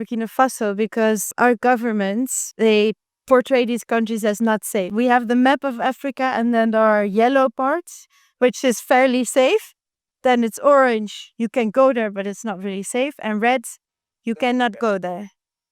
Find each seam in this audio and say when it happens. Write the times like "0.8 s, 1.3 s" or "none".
1.3 s, 2.4 s, 4.9 s